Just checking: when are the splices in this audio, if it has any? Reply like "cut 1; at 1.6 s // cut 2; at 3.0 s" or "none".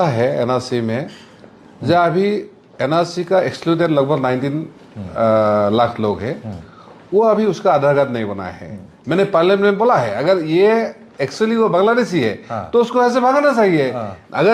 none